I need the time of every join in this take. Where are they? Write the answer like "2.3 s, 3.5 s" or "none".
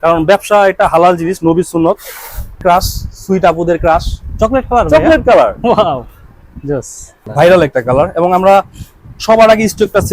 2.6 s, 7.2 s